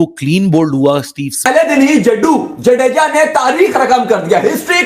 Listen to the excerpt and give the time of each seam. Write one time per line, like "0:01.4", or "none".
0:01.7